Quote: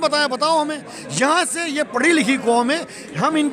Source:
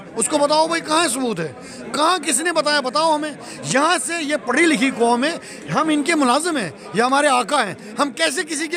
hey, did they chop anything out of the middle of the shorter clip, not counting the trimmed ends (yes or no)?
no